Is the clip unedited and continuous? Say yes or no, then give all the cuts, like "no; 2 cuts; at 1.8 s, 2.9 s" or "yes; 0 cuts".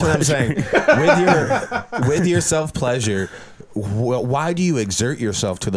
yes; 0 cuts